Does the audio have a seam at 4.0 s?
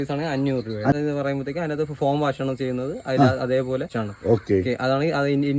yes; 2 cuts; at 0.9 s, 4.0 s

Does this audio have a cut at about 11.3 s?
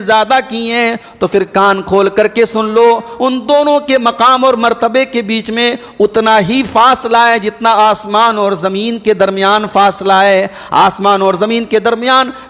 no; 0 cuts

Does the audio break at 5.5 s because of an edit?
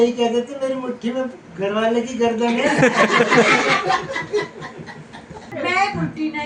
yes; 1 cut; at 5.5 s

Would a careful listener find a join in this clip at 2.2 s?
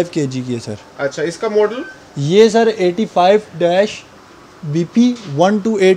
no; 0 cuts

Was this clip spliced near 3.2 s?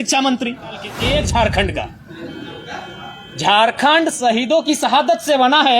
no; 1 cut; at 0.9 s

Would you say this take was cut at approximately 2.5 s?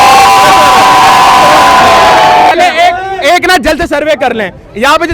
yes; 1 cut; at 2.5 s

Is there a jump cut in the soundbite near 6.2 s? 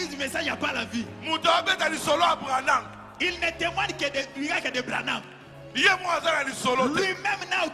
no; 0 cuts

